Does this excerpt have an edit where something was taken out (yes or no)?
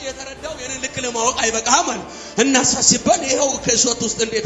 no